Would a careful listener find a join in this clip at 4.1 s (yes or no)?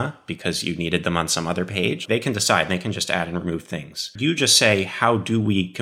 yes